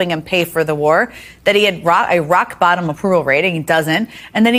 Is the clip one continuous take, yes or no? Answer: yes